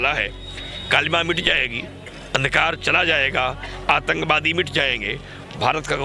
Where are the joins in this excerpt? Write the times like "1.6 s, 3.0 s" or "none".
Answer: none